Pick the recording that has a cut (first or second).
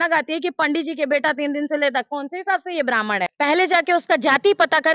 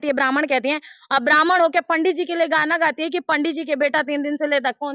first